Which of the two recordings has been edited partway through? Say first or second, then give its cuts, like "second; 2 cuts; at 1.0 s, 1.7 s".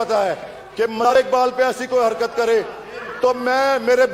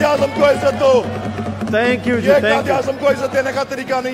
first; 1 cut; at 1.1 s